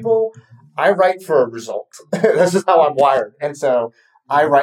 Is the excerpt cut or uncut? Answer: uncut